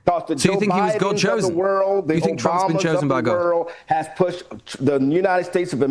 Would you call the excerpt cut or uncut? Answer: uncut